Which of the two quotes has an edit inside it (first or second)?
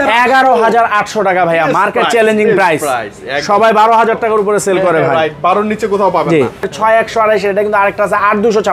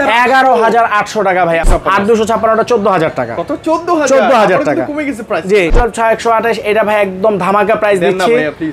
second